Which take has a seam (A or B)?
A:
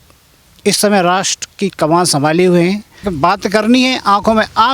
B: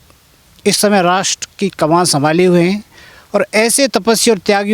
A